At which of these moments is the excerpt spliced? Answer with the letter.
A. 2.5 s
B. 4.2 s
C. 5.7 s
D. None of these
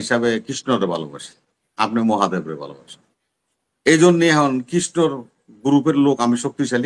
D